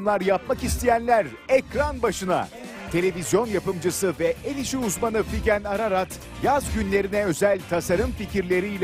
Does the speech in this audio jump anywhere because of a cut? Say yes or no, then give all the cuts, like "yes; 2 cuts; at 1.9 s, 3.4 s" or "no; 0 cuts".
no; 0 cuts